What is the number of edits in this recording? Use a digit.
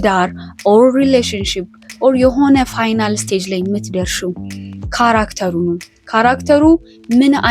0